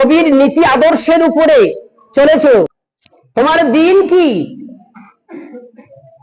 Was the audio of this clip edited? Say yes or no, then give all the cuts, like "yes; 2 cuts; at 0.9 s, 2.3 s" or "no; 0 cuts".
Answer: yes; 1 cut; at 2.9 s